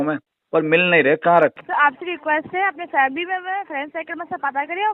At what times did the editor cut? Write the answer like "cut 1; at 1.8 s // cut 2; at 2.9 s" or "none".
cut 1; at 1.6 s

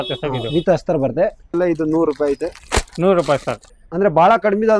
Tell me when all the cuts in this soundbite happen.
cut 1; at 1.5 s // cut 2; at 3.7 s

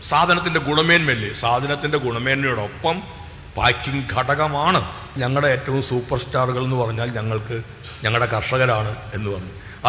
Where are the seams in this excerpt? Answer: cut 1; at 5.1 s

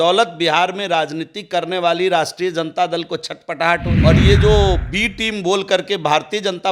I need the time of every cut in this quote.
cut 1; at 3.9 s

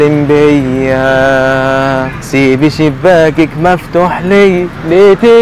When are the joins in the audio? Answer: none

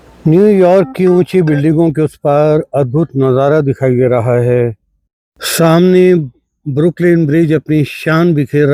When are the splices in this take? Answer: none

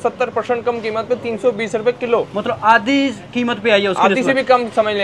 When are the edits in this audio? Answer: none

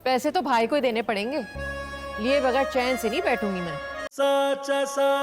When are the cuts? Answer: cut 1; at 4.0 s

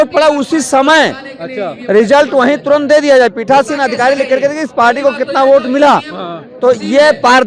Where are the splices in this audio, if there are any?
none

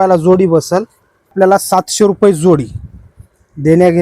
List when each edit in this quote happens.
cut 1; at 1.3 s

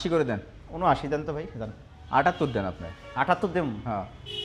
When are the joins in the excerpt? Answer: none

